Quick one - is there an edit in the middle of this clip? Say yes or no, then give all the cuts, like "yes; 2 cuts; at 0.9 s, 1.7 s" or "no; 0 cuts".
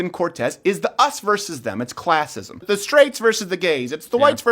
yes; 1 cut; at 2.6 s